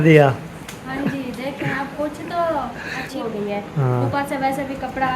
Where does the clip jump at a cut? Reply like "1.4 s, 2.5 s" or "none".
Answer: 3.2 s